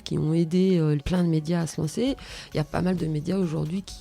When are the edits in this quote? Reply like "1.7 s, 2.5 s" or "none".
1.0 s